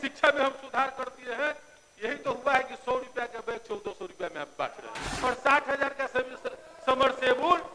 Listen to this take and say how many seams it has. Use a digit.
1